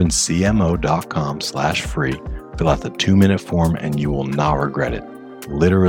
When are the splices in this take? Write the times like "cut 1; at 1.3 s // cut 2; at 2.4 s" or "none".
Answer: none